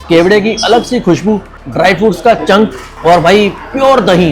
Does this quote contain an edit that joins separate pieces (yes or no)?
yes